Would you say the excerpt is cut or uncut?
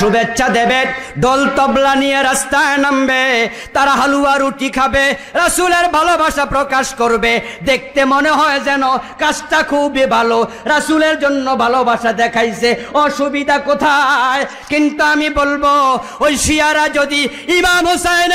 uncut